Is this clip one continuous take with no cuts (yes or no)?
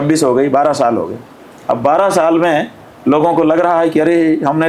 yes